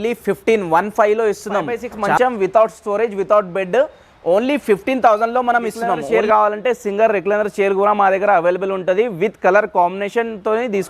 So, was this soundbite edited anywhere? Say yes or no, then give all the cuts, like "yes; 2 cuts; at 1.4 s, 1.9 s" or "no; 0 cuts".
yes; 2 cuts; at 2.2 s, 5.9 s